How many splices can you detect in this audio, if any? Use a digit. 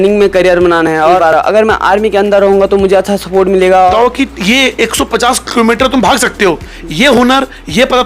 2